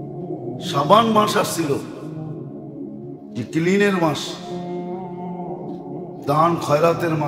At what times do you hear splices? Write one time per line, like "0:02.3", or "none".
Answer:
0:00.7
0:01.8
0:03.5
0:04.5
0:06.2